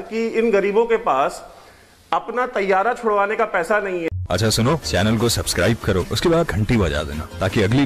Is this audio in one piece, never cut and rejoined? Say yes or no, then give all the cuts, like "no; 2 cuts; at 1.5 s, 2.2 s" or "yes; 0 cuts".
no; 1 cut; at 4.1 s